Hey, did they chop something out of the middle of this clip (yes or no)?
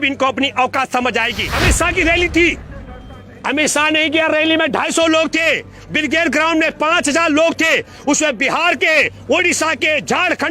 yes